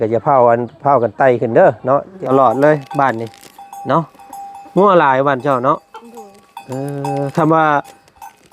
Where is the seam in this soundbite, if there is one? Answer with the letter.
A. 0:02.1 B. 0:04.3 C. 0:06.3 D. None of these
A